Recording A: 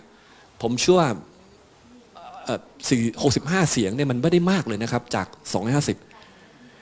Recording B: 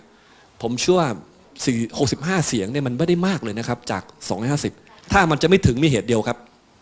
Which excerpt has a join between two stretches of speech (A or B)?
B